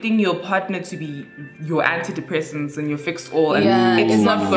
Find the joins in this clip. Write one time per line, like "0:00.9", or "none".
none